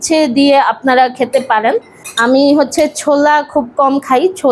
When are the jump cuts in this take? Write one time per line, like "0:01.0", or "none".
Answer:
0:02.0